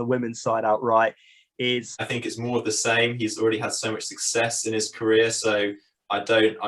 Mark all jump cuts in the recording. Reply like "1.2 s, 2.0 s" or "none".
2.1 s

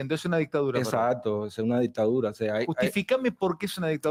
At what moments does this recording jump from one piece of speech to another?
none

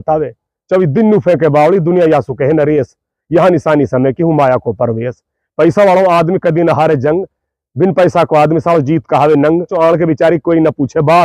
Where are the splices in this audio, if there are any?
9.7 s

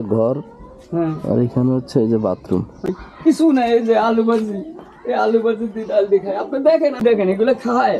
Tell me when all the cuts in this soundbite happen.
3.0 s, 7.0 s

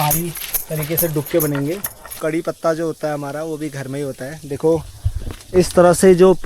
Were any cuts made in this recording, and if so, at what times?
2.1 s

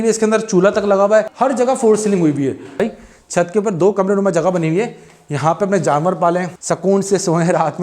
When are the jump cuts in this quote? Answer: 1.3 s, 2.8 s, 6.5 s

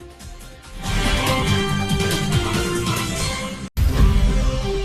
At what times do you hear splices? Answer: 1.4 s, 3.7 s

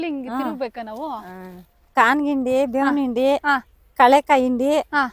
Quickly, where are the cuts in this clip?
1.7 s

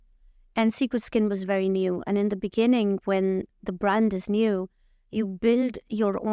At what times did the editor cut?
none

